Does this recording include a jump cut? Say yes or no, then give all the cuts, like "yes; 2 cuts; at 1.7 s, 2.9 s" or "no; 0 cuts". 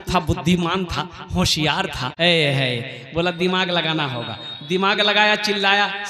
yes; 1 cut; at 2.0 s